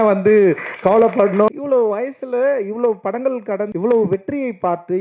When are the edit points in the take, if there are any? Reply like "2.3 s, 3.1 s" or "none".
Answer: 1.5 s, 3.7 s